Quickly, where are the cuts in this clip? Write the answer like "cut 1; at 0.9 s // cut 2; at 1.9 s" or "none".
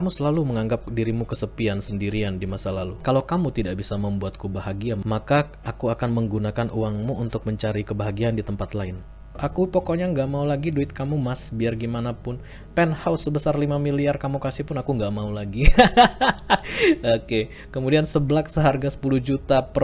cut 1; at 2.9 s // cut 2; at 9.3 s